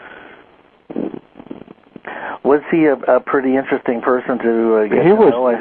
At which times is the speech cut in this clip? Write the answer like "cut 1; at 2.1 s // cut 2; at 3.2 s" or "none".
cut 1; at 4.3 s